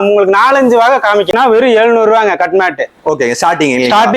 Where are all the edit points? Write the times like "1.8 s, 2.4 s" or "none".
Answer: 1.3 s